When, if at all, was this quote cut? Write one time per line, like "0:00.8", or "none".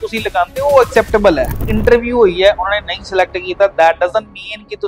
0:01.5

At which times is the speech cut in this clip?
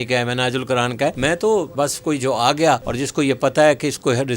0:01.2
0:01.7
0:02.9

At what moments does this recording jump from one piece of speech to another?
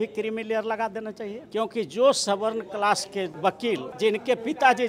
0:01.3
0:03.5

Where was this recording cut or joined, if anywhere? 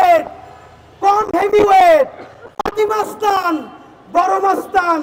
none

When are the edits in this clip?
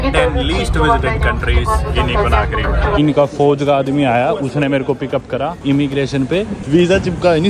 0:03.0
0:05.6
0:06.6

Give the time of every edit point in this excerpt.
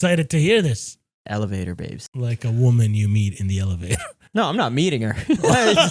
0:01.1
0:02.0

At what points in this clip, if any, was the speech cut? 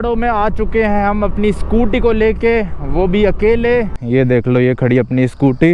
0:03.9

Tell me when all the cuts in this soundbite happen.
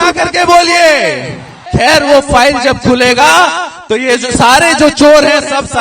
0:01.7

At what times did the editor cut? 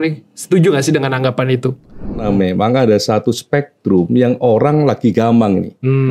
0:02.2

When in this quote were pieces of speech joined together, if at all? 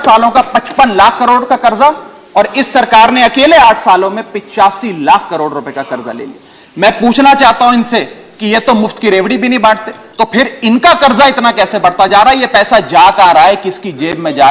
0:10.0

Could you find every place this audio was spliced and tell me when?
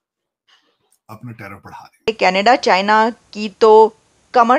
0:02.1

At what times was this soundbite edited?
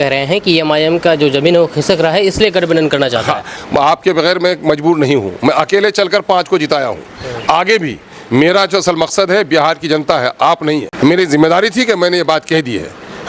0:03.6
0:10.9

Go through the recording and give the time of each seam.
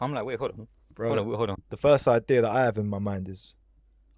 0:01.6

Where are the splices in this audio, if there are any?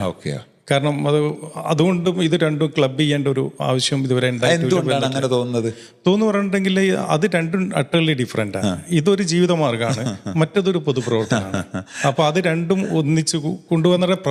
none

